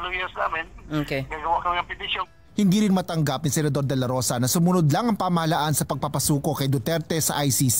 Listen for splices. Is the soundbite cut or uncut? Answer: cut